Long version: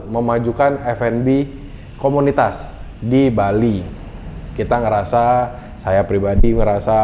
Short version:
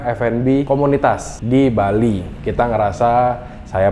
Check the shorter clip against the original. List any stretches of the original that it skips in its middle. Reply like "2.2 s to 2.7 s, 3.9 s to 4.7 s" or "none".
1.9 s to 2.7 s, 3.9 s to 4.5 s